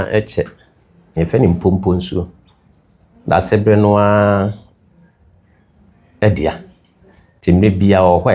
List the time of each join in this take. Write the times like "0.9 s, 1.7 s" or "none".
1.2 s